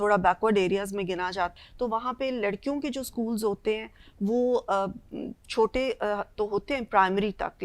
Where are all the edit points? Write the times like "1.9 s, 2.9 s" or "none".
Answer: 1.5 s